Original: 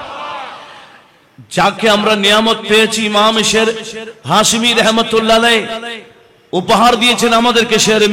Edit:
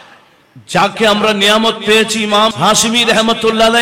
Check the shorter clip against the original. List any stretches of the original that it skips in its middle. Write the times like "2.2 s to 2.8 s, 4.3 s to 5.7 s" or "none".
3.3 s to 4.2 s